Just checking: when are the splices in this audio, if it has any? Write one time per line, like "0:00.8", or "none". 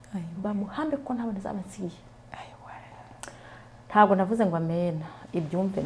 0:03.0